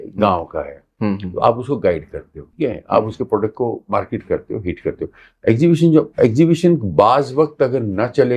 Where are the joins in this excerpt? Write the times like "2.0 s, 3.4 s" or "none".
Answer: 2.4 s, 3.8 s